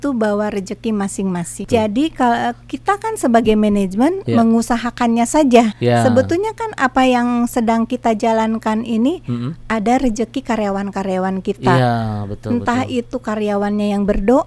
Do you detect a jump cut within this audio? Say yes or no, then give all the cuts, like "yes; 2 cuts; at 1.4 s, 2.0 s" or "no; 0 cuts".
yes; 2 cuts; at 1.6 s, 5.8 s